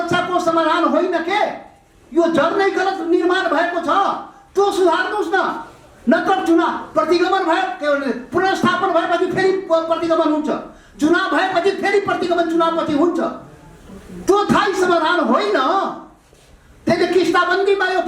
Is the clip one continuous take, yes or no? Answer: yes